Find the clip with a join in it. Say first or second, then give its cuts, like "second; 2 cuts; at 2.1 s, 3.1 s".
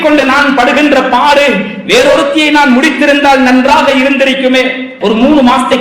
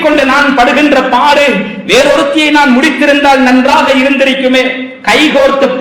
first; 1 cut; at 4.9 s